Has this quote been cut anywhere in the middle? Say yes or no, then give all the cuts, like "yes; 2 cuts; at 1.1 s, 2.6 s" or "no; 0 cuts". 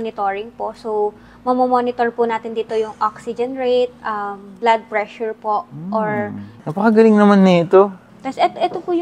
yes; 2 cuts; at 6.5 s, 8.1 s